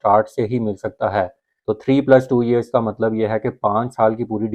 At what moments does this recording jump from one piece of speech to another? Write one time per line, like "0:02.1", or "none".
0:01.4